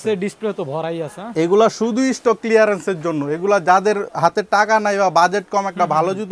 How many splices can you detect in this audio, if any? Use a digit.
1